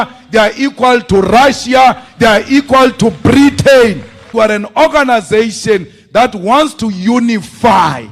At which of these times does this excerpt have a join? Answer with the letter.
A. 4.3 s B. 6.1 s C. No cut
A